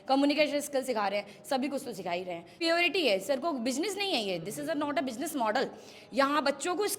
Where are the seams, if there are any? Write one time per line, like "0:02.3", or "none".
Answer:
0:02.6